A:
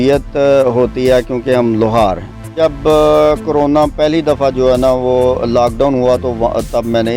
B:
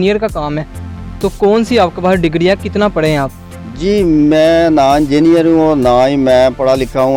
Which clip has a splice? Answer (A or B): A